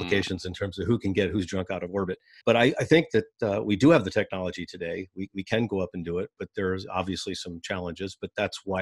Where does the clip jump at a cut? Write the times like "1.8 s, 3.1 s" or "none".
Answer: 2.3 s